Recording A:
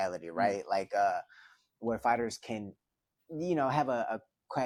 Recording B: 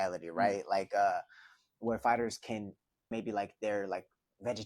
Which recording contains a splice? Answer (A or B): B